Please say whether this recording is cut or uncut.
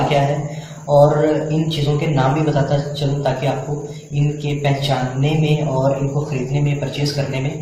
cut